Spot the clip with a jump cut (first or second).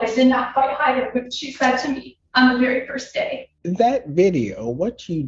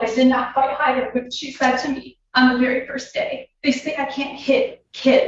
first